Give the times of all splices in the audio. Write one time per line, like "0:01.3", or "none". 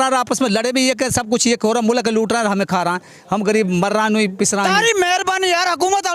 0:04.7